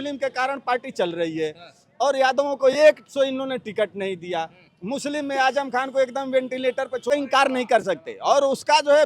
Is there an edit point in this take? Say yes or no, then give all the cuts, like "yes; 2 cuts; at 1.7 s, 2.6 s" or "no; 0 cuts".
yes; 1 cut; at 7.0 s